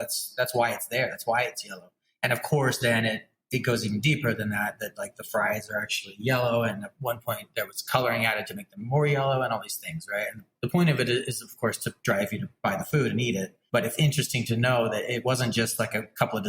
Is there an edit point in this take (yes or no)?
yes